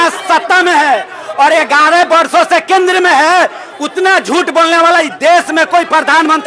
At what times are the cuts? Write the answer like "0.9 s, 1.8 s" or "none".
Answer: none